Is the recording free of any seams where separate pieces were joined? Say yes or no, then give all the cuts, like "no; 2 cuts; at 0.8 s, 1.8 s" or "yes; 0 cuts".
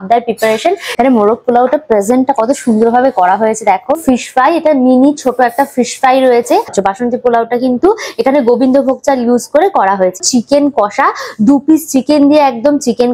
no; 4 cuts; at 0.9 s, 4.0 s, 6.7 s, 10.2 s